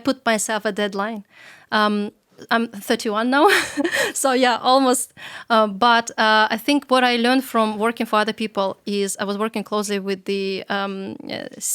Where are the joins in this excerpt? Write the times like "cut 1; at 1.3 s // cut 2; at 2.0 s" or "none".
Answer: none